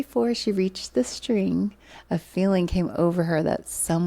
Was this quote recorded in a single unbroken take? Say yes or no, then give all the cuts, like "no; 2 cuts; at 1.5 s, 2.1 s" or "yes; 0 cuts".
yes; 0 cuts